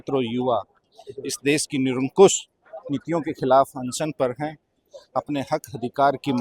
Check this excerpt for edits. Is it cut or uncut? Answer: uncut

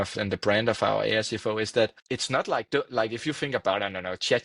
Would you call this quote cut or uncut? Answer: cut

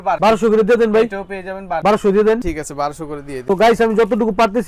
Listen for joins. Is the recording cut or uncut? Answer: uncut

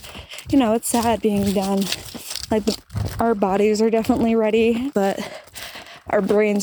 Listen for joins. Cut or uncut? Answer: cut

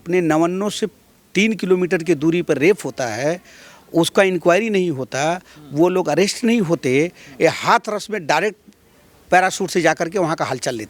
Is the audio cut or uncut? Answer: uncut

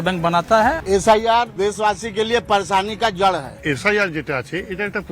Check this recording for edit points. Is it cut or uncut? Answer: cut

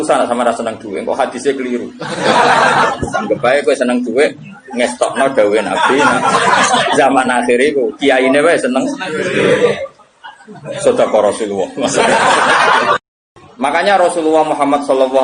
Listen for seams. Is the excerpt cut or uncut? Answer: cut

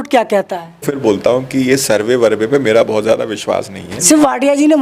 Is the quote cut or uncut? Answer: cut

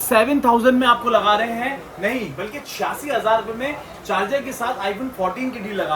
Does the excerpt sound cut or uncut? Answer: uncut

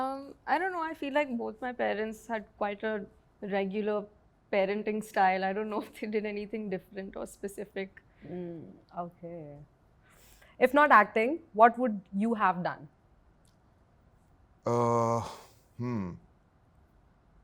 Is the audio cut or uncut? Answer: uncut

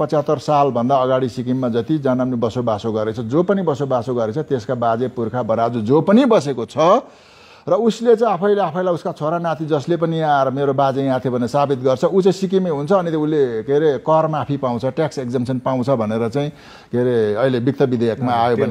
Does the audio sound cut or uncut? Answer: uncut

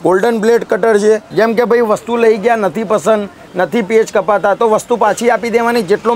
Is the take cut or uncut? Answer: cut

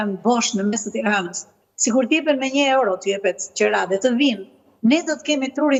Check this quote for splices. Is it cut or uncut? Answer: uncut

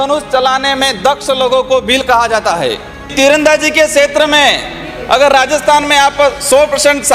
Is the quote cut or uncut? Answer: cut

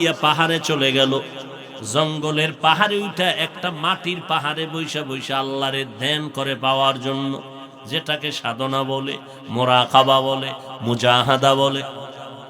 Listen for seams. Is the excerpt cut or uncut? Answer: uncut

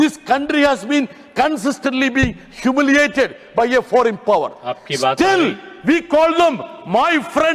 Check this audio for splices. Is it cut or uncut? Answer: uncut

